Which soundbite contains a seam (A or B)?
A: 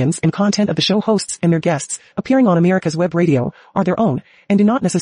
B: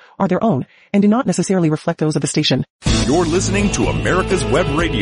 B